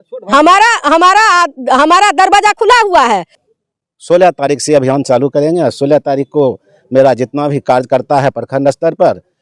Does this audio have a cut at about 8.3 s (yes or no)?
no